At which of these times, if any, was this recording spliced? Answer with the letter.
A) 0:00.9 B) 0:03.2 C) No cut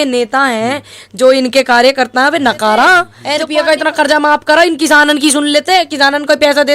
B